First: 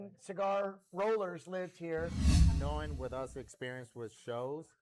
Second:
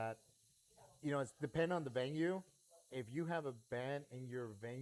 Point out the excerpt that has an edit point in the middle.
first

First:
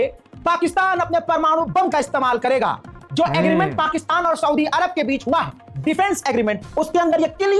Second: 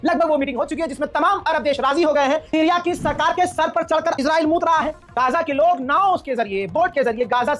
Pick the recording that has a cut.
second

